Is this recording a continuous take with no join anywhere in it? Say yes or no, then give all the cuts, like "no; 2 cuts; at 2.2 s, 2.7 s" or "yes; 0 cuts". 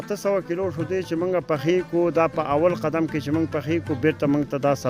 yes; 0 cuts